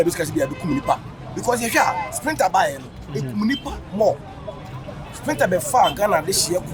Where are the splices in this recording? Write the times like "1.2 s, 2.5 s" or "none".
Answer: none